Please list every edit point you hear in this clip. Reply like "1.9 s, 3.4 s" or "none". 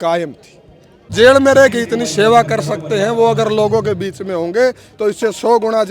1.1 s